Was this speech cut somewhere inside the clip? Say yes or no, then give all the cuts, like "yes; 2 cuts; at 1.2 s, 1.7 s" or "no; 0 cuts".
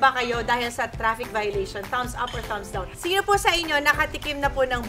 yes; 1 cut; at 2.9 s